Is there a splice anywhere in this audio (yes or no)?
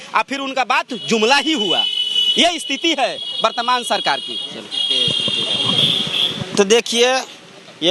no